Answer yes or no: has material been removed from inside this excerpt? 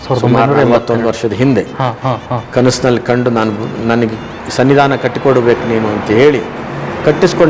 no